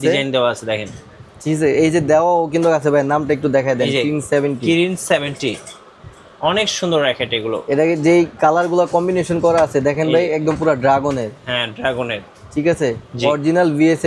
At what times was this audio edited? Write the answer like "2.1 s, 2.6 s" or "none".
none